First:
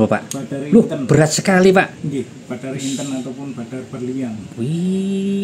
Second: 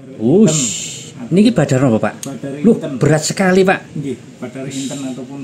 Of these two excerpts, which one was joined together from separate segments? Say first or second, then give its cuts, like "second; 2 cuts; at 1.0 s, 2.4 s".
first; 1 cut; at 4.4 s